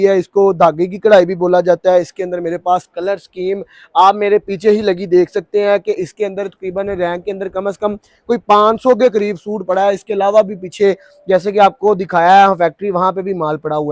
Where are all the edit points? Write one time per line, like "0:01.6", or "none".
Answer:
none